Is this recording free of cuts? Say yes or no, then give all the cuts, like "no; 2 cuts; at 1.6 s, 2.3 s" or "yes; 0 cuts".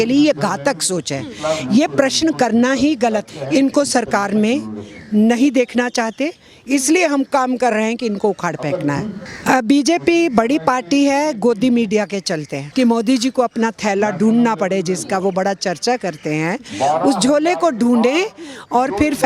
no; 3 cuts; at 3.3 s, 9.1 s, 12.6 s